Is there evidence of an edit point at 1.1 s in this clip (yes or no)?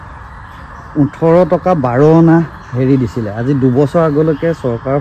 no